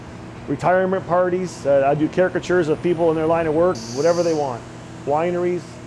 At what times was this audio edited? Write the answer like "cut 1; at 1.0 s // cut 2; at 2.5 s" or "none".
cut 1; at 3.8 s